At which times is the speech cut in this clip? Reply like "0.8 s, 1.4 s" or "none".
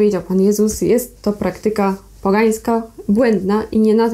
none